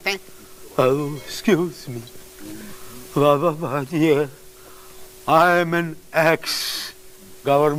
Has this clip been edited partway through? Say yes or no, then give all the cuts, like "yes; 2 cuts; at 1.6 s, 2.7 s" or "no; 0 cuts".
no; 0 cuts